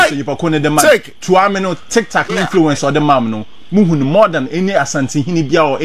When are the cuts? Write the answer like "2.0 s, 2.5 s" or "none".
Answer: none